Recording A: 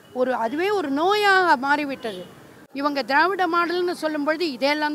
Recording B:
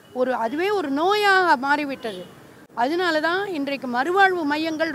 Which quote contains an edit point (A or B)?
A